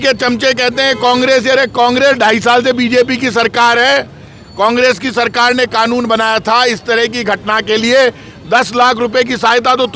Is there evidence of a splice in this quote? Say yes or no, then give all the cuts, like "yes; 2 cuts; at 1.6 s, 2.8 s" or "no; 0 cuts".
no; 0 cuts